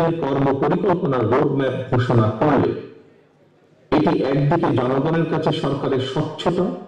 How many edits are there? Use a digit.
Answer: 0